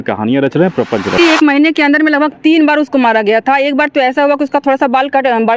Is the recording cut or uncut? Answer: cut